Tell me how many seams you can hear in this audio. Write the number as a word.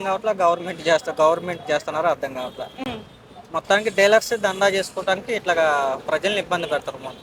zero